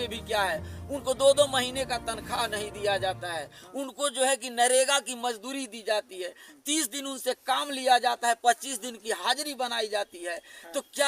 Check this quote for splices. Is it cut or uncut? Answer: uncut